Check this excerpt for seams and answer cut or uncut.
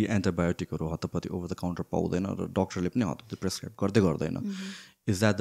uncut